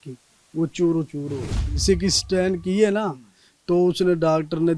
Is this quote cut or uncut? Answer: cut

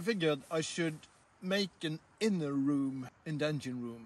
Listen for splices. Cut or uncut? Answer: cut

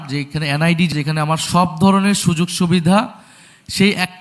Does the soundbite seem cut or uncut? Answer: cut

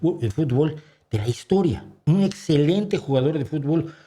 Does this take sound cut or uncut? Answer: cut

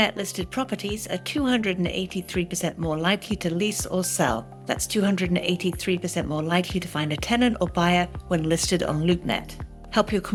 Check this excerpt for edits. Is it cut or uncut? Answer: uncut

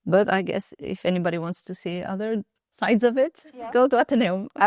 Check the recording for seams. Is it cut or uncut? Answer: uncut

